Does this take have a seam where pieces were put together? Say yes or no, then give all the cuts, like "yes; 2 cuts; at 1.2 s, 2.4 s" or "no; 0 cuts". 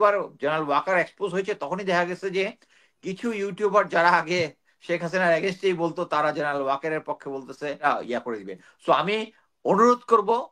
yes; 1 cut; at 7.8 s